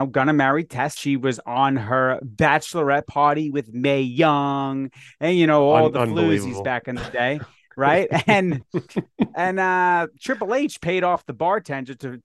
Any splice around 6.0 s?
no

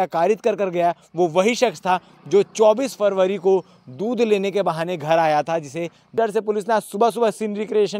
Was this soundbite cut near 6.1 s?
yes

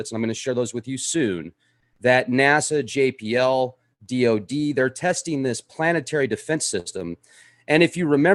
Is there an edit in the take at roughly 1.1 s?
yes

